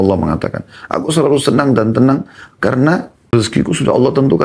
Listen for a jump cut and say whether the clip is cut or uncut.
cut